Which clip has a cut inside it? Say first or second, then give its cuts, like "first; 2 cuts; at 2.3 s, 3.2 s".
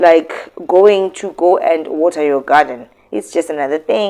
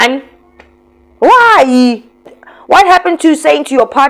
second; 1 cut; at 2.2 s